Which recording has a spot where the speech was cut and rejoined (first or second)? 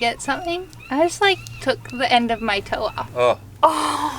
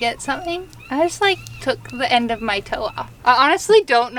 first